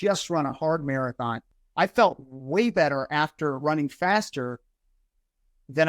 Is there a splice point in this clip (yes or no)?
yes